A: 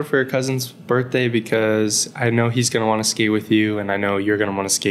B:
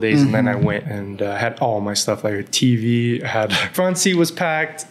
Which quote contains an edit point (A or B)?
B